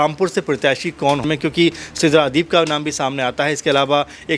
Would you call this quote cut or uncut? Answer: cut